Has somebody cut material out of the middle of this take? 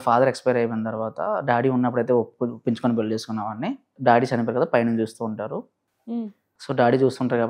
yes; 1 cut; at 3.9 s

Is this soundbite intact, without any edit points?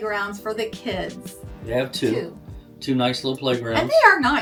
yes; 0 cuts

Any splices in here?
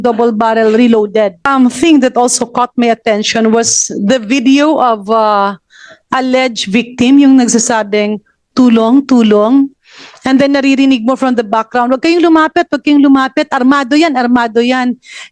yes; 1 cut; at 1.5 s

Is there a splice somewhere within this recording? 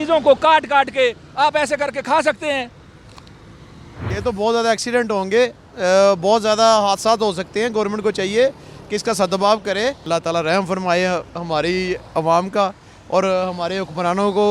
yes; 2 cuts; at 4.0 s, 10.0 s

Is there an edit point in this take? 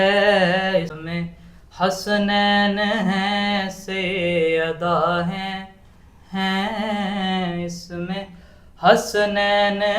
yes; 1 cut; at 1.0 s

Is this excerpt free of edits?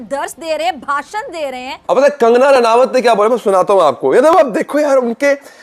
no; 1 cut; at 1.8 s

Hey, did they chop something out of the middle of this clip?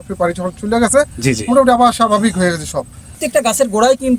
yes; 1 cut; at 3.1 s

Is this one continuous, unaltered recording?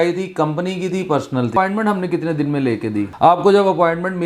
no; 2 cuts; at 1.5 s, 3.1 s

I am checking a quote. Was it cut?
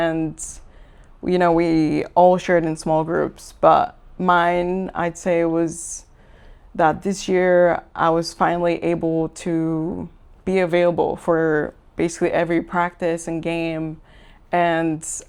no; 0 cuts

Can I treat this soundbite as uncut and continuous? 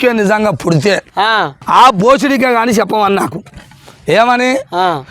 no; 1 cut; at 1.6 s

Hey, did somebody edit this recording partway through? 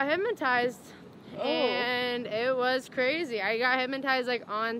no; 0 cuts

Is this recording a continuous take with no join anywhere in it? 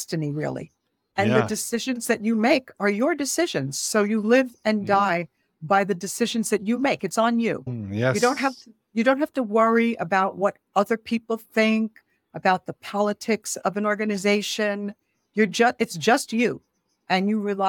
yes; 0 cuts

